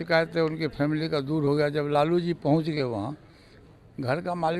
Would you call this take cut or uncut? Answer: uncut